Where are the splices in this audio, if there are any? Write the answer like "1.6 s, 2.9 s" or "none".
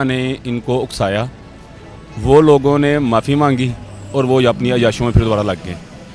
none